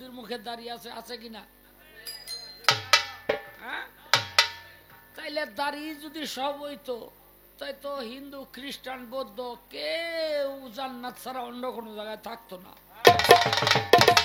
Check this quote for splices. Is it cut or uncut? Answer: uncut